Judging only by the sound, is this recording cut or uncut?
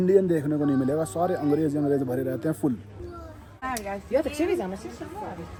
uncut